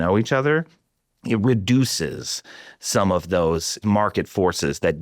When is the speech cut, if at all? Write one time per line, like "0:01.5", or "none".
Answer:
0:03.8